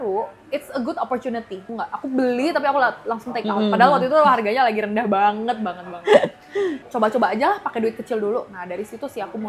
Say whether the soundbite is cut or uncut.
cut